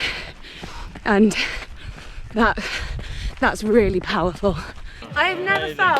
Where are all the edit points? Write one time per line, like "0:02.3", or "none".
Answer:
0:05.0